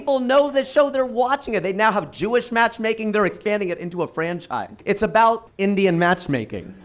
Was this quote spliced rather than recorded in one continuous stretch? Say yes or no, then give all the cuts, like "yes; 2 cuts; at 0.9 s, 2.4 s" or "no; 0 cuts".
yes; 2 cuts; at 4.7 s, 5.5 s